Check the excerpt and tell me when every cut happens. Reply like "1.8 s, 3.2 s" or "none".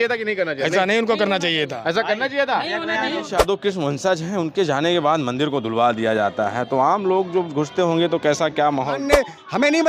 3.3 s, 9.0 s